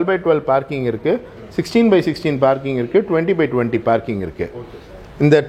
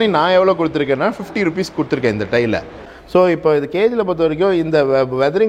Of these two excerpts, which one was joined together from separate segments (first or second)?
second